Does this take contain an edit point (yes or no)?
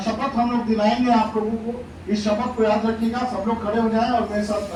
no